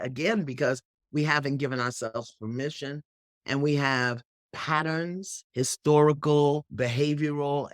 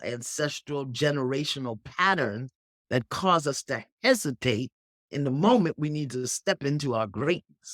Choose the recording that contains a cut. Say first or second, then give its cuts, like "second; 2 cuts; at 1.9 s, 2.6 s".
first; 2 cuts; at 5.4 s, 6.7 s